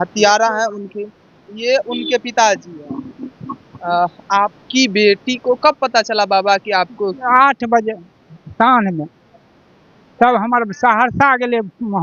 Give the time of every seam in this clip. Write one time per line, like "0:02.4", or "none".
none